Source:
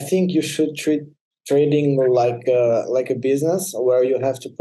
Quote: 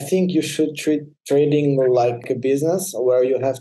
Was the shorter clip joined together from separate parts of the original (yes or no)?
yes